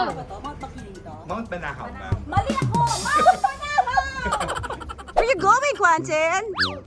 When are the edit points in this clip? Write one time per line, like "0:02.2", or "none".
0:05.2